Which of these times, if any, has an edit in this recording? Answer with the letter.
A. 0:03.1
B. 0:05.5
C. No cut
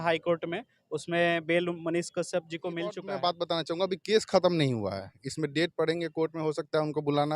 A